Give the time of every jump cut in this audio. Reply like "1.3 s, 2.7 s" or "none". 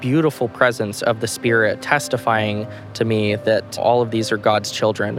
1.8 s, 3.8 s

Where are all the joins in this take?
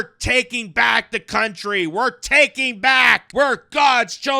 3.2 s

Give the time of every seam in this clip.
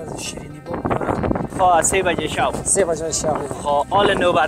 1.5 s

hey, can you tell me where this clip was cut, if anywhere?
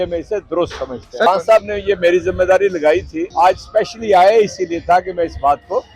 1.3 s, 3.2 s

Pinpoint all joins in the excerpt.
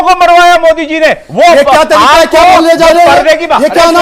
1.2 s

